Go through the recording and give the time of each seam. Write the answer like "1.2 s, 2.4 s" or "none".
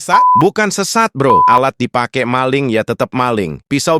1.5 s